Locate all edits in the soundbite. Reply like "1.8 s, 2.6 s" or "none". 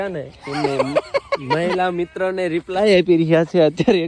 none